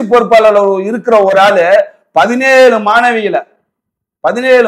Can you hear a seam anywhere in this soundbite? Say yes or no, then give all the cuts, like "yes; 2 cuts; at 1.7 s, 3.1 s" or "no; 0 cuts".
no; 0 cuts